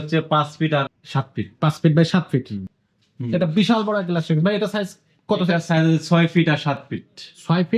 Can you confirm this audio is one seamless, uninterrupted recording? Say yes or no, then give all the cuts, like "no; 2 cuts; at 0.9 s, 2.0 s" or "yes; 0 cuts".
no; 2 cuts; at 1.0 s, 2.6 s